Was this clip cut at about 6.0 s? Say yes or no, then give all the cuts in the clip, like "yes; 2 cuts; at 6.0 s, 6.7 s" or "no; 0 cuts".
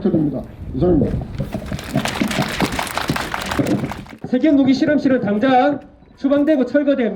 no; 1 cut; at 3.7 s